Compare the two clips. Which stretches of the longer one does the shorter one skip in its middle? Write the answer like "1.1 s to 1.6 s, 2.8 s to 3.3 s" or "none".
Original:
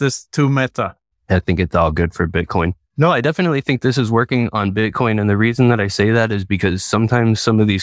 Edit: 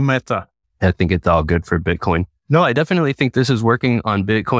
none